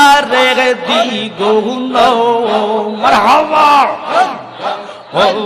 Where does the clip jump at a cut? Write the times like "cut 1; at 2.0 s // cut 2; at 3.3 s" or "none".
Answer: none